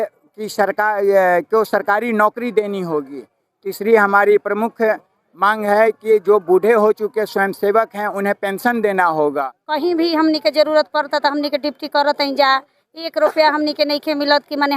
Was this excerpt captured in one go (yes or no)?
no